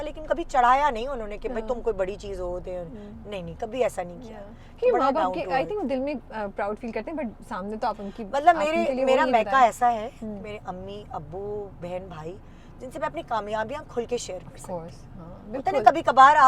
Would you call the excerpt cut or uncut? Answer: uncut